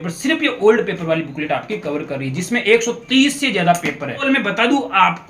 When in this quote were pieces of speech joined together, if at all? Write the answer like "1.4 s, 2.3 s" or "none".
4.2 s